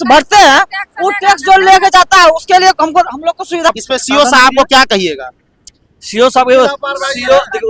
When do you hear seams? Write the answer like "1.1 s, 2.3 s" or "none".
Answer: 3.7 s